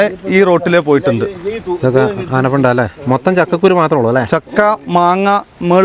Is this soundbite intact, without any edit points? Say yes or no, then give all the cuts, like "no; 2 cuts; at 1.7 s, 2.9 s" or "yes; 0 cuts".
yes; 0 cuts